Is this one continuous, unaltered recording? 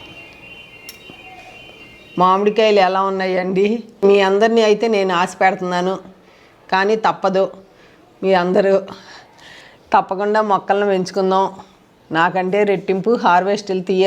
no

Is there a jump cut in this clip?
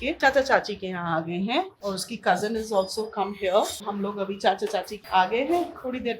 no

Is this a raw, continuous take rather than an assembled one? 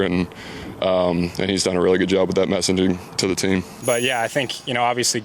no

